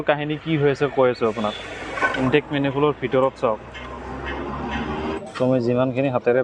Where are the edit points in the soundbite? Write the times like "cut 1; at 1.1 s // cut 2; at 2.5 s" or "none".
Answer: cut 1; at 2.1 s // cut 2; at 5.2 s